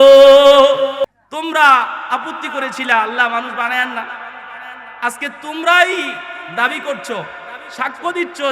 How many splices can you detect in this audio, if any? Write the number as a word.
one